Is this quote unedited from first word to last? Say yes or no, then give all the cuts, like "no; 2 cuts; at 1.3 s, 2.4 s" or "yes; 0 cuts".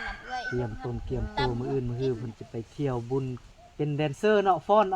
no; 1 cut; at 3.4 s